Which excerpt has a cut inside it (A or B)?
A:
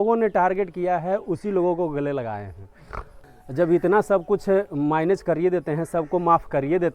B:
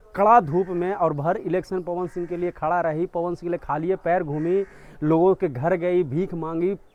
A